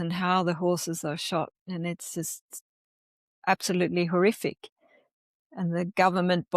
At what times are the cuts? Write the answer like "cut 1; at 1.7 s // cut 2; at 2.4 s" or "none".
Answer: none